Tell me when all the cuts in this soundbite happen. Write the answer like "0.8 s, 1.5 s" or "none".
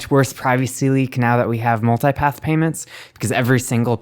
none